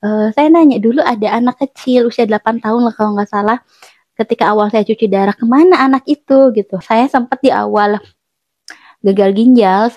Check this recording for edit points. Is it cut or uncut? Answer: cut